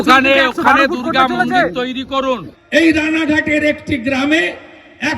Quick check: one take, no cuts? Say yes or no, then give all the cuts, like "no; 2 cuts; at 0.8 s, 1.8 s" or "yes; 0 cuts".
no; 1 cut; at 2.6 s